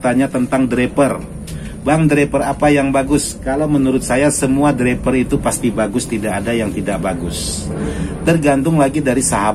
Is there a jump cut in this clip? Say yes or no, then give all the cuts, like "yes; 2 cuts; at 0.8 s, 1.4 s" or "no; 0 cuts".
no; 0 cuts